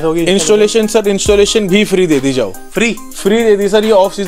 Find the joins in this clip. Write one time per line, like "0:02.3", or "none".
none